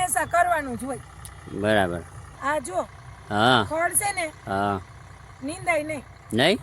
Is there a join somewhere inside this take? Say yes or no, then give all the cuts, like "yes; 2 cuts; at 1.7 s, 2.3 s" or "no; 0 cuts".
yes; 1 cut; at 2.2 s